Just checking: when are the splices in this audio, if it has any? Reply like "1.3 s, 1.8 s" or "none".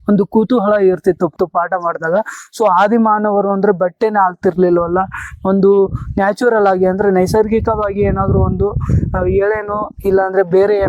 1.3 s